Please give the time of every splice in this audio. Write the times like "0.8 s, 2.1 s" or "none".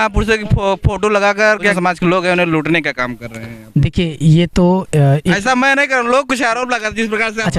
1.7 s